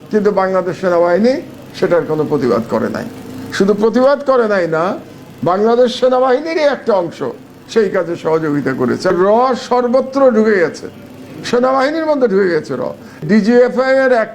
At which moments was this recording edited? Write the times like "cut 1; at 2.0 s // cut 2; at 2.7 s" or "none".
cut 1; at 9.1 s // cut 2; at 13.2 s